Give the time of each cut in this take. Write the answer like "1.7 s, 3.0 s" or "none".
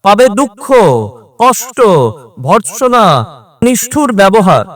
3.6 s